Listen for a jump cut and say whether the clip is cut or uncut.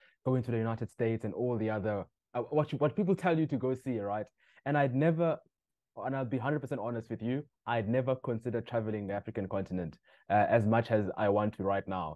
uncut